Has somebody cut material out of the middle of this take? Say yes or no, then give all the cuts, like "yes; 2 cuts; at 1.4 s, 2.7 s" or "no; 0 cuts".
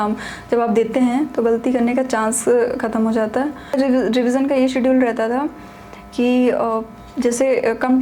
yes; 1 cut; at 3.7 s